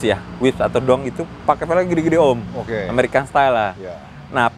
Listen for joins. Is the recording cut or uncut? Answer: uncut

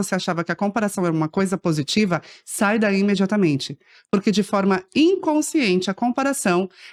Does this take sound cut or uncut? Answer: uncut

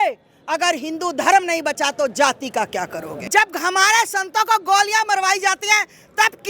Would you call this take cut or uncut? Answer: cut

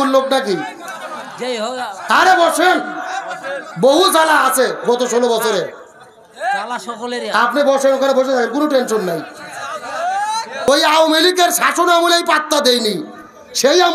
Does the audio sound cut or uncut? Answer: cut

